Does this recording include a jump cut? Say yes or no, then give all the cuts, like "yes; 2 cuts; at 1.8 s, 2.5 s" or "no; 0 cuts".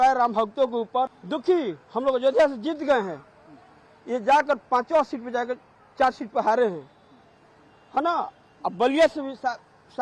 no; 0 cuts